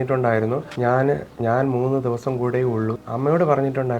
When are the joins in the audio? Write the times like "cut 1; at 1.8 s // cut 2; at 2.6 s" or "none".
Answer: cut 1; at 3.0 s